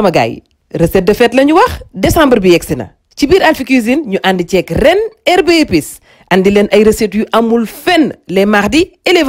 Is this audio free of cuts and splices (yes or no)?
yes